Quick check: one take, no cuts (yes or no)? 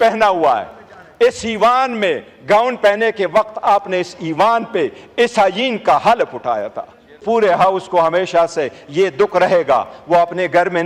no